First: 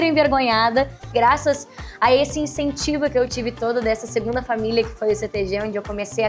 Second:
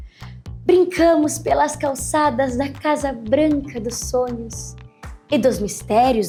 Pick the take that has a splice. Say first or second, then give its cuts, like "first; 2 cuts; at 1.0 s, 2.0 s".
first; 1 cut; at 1.1 s